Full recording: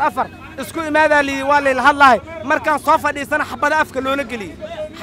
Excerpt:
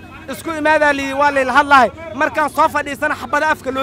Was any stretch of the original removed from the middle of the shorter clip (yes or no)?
no